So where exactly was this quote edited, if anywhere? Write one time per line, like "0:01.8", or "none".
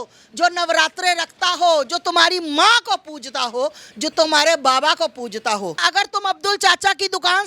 0:05.8